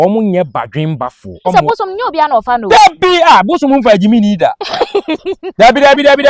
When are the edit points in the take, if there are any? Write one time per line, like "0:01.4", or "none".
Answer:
0:01.2